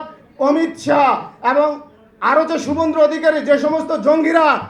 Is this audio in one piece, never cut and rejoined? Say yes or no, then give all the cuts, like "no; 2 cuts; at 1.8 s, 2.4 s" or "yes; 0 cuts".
yes; 0 cuts